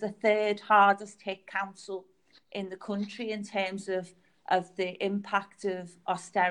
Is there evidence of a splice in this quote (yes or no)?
no